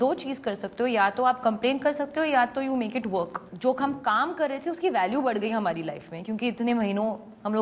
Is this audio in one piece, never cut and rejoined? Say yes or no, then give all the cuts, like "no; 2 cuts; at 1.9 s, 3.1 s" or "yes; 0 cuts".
no; 1 cut; at 3.4 s